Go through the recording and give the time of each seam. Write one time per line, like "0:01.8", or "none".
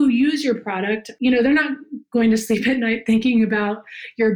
0:01.1